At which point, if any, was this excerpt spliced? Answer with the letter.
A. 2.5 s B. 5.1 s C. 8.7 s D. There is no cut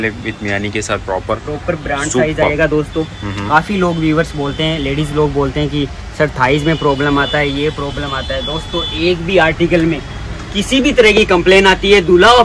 D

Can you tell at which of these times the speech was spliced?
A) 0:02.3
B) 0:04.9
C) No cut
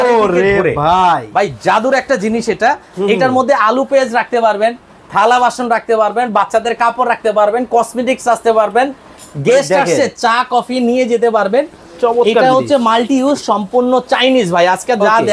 C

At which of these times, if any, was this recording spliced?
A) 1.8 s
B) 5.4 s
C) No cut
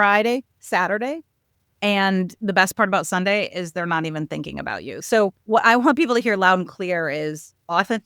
B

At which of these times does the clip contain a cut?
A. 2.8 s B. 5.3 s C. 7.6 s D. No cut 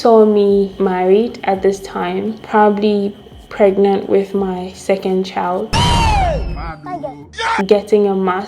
D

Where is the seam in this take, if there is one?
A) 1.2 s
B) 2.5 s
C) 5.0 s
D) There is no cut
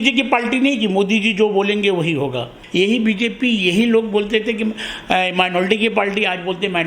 B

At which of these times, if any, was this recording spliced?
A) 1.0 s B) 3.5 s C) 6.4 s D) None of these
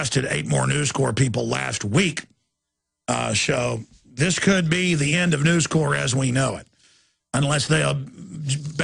C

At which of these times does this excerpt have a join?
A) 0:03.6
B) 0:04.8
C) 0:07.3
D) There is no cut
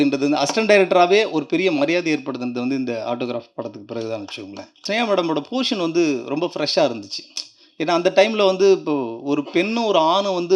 B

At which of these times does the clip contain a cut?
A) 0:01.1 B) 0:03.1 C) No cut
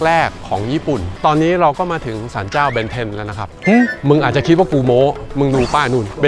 A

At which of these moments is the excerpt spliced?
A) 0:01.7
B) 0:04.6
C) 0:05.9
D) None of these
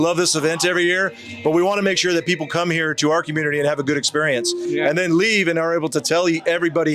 D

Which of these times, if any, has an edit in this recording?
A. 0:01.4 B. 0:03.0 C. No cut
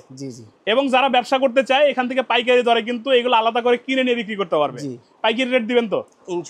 C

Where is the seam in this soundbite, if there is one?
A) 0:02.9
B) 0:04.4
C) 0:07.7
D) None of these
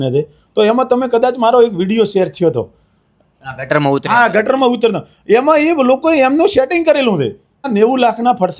C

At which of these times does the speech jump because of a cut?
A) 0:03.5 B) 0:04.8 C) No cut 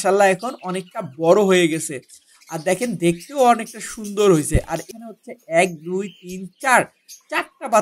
B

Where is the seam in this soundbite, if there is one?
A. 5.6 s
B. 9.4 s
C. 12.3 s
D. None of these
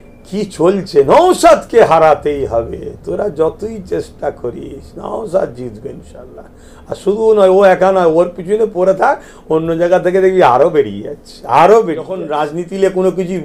C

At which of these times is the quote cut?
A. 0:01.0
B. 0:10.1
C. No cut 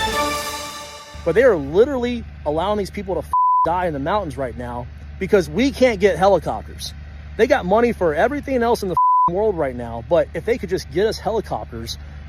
A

